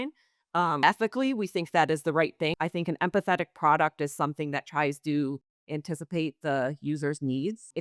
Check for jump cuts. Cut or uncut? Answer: cut